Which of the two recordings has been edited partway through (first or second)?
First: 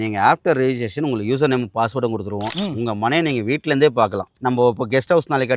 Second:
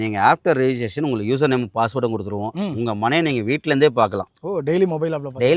first